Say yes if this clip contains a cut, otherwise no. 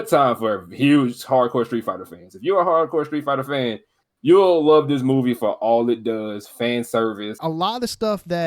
yes